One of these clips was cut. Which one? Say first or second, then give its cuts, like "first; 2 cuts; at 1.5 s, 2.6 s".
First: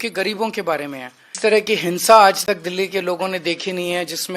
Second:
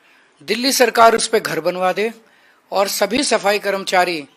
first; 1 cut; at 1.3 s